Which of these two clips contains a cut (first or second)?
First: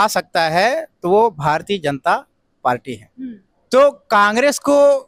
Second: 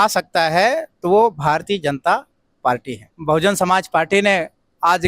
second